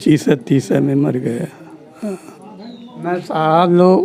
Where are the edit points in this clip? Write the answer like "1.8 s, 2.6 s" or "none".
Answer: 2.9 s